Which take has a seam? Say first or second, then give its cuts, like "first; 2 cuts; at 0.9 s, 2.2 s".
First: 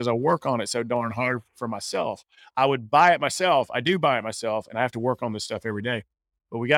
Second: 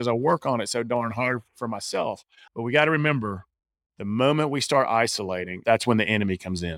second; 2 cuts; at 2.3 s, 5.6 s